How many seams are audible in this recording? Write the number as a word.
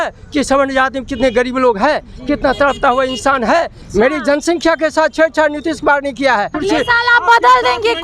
two